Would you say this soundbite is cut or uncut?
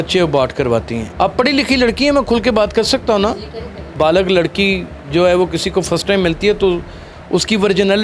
cut